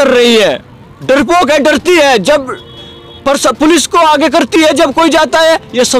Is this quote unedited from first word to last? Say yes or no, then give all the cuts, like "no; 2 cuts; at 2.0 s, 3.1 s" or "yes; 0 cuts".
yes; 0 cuts